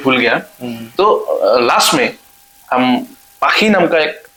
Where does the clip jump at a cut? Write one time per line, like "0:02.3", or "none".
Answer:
none